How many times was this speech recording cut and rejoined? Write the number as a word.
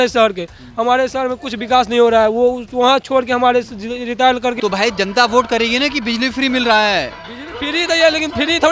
one